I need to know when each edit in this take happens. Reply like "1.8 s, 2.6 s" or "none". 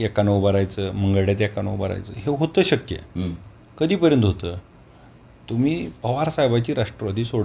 none